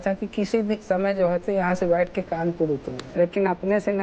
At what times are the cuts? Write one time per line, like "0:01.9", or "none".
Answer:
0:03.0